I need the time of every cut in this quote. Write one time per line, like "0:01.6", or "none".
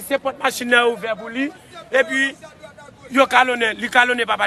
none